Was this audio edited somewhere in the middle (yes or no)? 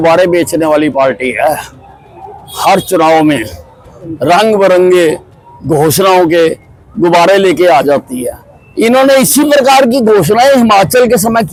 no